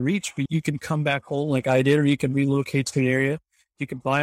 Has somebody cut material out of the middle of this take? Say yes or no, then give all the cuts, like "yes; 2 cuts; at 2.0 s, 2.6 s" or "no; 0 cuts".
no; 0 cuts